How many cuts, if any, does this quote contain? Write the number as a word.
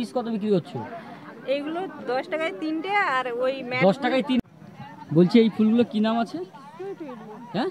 one